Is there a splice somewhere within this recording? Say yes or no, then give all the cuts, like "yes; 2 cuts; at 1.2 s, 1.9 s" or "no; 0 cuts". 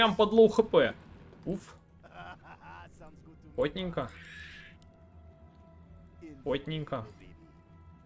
no; 0 cuts